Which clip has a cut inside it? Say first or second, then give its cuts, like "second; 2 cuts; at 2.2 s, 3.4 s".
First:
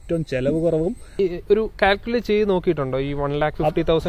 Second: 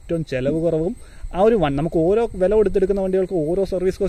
first; 1 cut; at 1.1 s